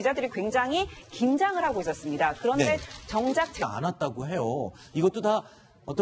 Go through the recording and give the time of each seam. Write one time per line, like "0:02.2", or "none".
none